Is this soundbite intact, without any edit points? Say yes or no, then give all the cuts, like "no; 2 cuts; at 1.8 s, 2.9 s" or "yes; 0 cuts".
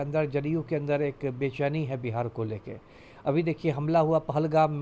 yes; 0 cuts